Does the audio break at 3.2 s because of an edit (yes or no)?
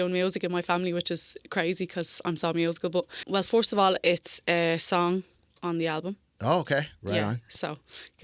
yes